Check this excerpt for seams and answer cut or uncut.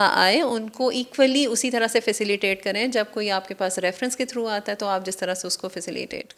uncut